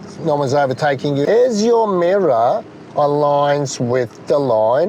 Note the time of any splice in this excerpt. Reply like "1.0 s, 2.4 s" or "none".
1.2 s

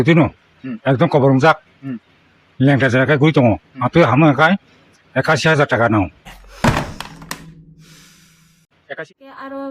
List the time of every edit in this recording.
8.7 s

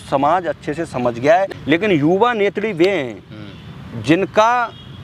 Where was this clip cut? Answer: 1.5 s

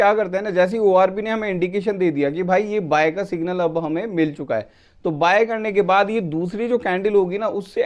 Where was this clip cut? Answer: none

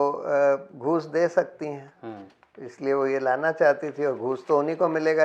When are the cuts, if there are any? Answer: none

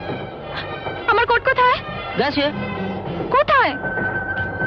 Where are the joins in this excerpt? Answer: none

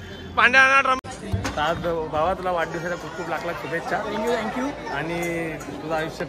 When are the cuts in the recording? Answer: 1.0 s

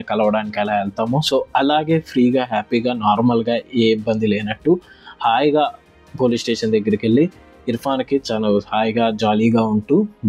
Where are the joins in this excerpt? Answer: none

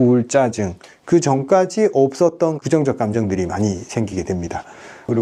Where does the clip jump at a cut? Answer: none

